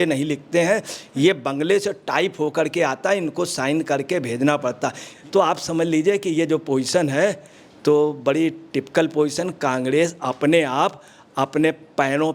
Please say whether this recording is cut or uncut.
cut